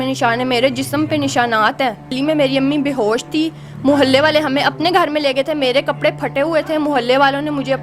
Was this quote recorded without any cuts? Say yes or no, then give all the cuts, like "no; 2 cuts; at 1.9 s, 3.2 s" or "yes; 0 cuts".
no; 1 cut; at 2.2 s